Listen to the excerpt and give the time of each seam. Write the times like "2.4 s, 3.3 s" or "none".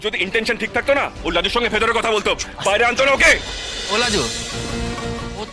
4.4 s